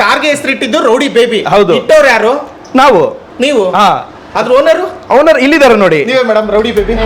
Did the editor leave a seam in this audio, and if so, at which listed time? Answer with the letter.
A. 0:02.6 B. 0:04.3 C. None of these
C